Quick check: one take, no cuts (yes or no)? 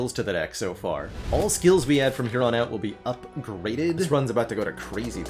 no